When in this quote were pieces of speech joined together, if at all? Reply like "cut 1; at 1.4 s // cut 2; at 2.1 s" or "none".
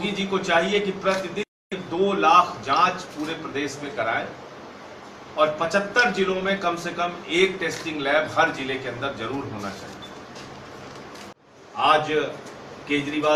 cut 1; at 11.4 s